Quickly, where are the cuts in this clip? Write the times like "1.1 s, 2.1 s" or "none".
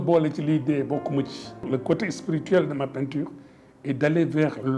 1.6 s